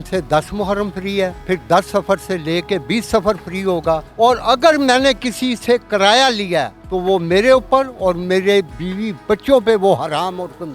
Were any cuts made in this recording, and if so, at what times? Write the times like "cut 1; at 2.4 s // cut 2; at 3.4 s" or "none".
cut 1; at 1.4 s // cut 2; at 4.1 s // cut 3; at 6.8 s // cut 4; at 8.8 s